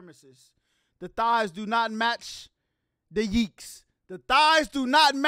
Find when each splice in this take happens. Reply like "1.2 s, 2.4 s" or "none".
none